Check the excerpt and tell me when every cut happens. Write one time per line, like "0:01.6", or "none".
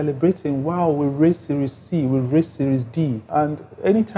0:03.2

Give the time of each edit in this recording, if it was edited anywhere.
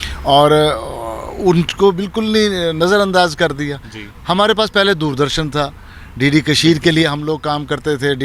none

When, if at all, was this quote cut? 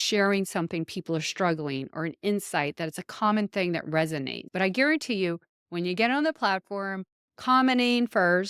0:04.4

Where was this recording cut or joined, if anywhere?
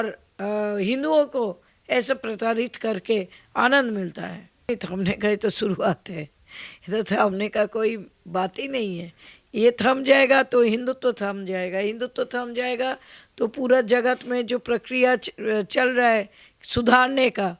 0:04.7

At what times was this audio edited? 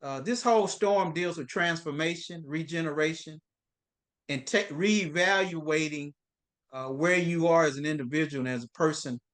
none

